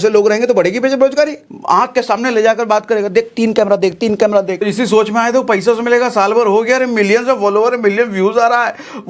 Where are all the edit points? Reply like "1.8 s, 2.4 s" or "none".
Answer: 1.5 s, 4.6 s